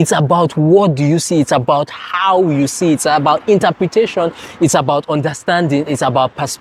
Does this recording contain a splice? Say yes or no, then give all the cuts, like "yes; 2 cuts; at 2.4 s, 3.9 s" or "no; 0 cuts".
no; 0 cuts